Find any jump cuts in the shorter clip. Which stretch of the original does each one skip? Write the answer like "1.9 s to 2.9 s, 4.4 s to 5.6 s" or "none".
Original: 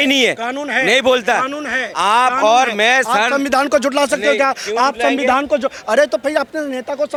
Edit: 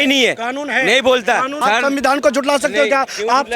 1.6 s to 3.1 s